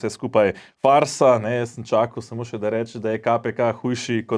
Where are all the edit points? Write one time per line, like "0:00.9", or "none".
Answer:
none